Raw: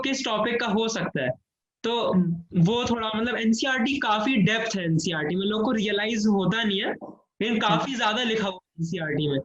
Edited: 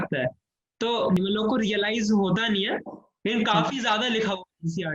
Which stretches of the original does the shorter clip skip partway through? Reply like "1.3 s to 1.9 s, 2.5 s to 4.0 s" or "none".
2.2 s to 5.3 s